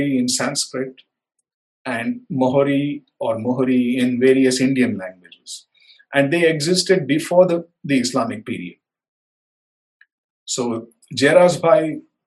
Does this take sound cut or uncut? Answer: uncut